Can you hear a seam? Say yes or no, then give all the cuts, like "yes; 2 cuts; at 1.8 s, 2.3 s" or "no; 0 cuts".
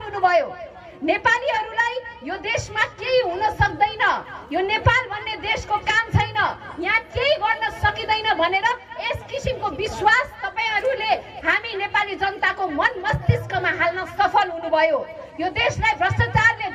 no; 0 cuts